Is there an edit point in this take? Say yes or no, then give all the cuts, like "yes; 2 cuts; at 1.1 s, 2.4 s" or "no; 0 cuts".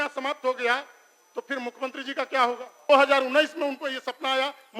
yes; 1 cut; at 2.9 s